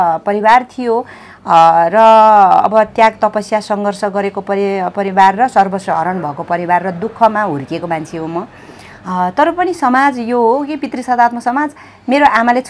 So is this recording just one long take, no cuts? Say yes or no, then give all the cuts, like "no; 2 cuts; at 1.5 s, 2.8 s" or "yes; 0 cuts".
yes; 0 cuts